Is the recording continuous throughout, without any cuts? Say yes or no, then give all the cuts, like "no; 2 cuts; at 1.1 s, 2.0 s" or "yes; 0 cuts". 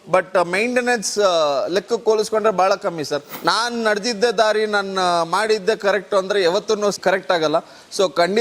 no; 2 cuts; at 3.3 s, 7.0 s